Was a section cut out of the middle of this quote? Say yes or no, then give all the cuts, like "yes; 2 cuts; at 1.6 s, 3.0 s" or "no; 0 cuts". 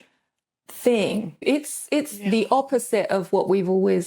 yes; 1 cut; at 1.4 s